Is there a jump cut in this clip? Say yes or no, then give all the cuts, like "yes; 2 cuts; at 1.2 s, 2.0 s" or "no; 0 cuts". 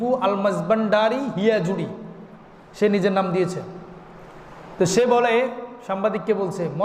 no; 0 cuts